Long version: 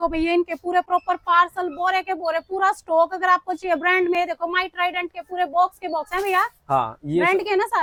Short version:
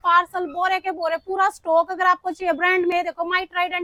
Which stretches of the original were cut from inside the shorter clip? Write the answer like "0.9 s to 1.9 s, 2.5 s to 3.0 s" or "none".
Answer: none